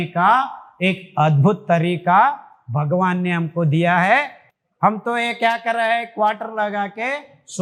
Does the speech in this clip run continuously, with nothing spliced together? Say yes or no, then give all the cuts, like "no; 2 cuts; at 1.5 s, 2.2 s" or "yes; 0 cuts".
yes; 0 cuts